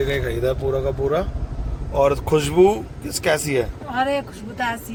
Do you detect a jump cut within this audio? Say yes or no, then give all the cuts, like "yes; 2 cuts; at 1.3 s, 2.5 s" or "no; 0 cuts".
no; 0 cuts